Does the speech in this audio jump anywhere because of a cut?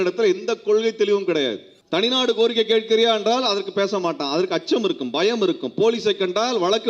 yes; 1 cut; at 1.7 s

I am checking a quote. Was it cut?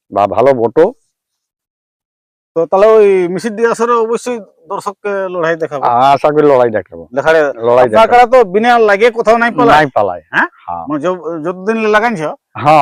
no; 0 cuts

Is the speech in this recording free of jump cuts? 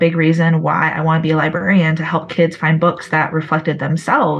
yes; 0 cuts

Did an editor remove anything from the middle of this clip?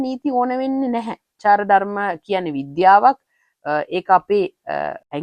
yes; 1 cut; at 1.4 s

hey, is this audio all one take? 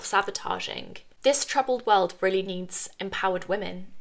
no; 1 cut; at 1.0 s

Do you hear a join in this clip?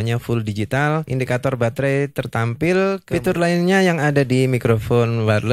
yes; 2 cuts; at 1.1 s, 3.0 s

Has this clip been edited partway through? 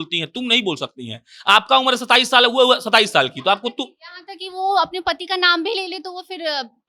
no; 0 cuts

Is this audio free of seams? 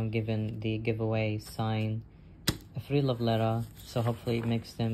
yes; 0 cuts

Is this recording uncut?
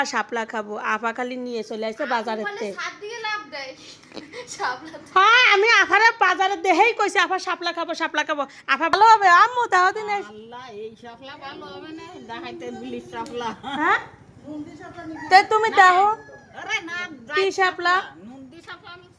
no; 1 cut; at 8.9 s

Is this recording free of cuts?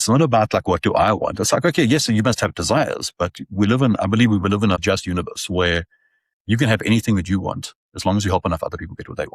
no; 1 cut; at 4.8 s

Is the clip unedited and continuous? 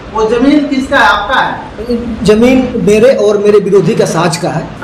yes; 0 cuts

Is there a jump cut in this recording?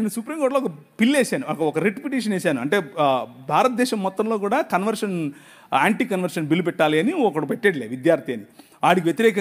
no; 0 cuts

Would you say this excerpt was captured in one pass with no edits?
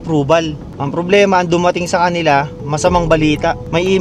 yes; 0 cuts

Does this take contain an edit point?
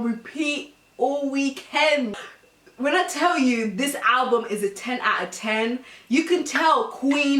yes; 1 cut; at 2.2 s

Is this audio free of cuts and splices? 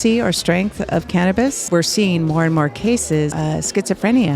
no; 2 cuts; at 1.6 s, 3.3 s

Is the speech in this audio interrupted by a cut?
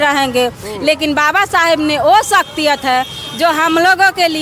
no; 0 cuts

